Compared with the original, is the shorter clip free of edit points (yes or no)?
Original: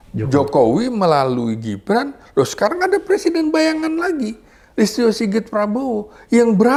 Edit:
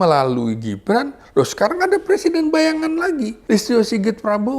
no